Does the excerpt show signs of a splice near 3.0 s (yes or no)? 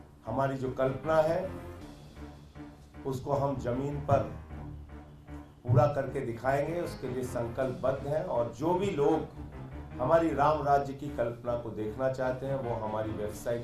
yes